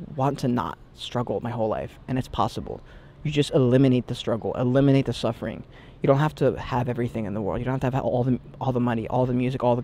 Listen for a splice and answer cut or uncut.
uncut